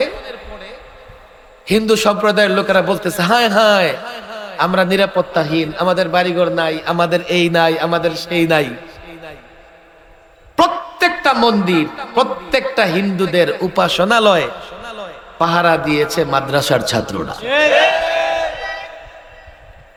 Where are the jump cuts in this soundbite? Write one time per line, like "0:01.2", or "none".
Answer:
none